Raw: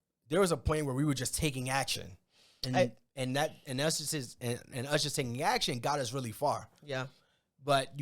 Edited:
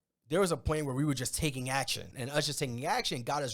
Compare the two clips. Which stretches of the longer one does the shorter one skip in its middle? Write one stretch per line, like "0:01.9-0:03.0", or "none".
0:02.1-0:04.7